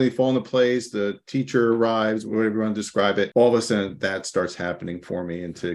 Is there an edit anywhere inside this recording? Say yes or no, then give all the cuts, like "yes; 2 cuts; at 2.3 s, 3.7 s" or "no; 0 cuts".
yes; 3 cuts; at 2.2 s, 3.3 s, 3.9 s